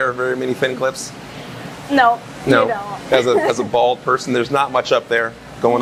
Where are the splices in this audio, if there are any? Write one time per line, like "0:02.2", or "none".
none